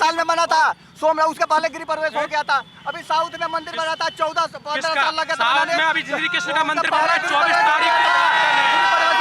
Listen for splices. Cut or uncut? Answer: uncut